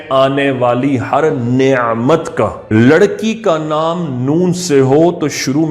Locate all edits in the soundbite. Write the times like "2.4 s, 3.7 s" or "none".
2.6 s